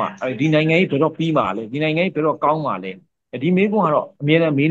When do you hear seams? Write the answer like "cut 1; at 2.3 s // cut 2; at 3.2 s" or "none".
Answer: none